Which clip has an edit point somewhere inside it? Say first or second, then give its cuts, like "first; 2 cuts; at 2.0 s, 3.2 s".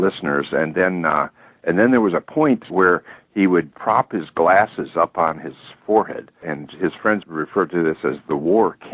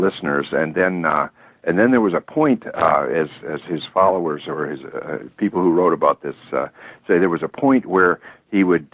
first; 3 cuts; at 2.7 s, 3.7 s, 7.3 s